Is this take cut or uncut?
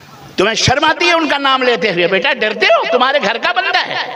uncut